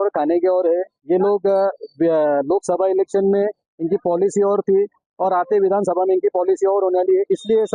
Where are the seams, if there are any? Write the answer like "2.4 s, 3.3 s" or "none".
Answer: none